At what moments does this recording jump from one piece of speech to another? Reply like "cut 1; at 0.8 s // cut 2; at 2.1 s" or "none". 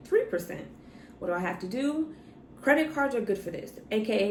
none